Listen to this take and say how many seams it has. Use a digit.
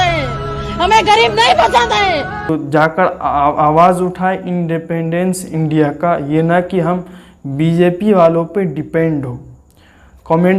1